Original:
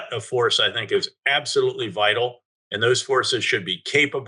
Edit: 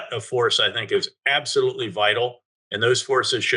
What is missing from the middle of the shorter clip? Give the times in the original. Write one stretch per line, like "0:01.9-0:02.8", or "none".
none